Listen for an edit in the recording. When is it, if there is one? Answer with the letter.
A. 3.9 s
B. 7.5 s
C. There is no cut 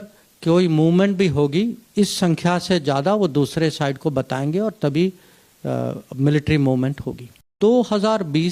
B